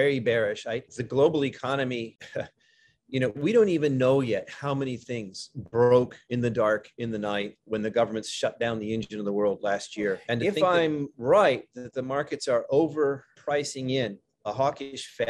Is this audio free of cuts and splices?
no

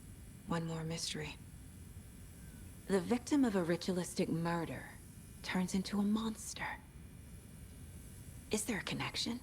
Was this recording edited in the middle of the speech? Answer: yes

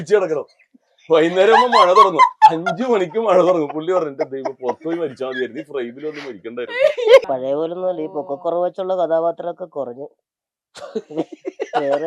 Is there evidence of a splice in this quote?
yes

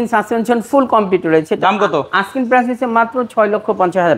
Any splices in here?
no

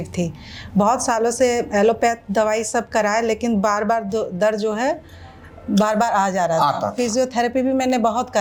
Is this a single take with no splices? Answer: yes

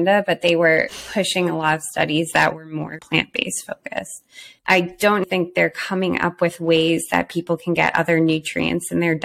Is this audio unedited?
no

